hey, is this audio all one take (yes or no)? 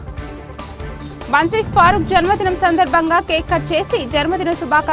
no